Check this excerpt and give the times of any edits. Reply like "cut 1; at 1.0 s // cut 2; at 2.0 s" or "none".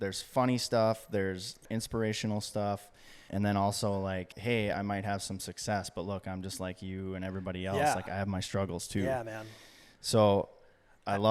cut 1; at 1.6 s // cut 2; at 3.3 s // cut 3; at 4.3 s